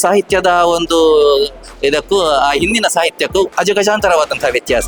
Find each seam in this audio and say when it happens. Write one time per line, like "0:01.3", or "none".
none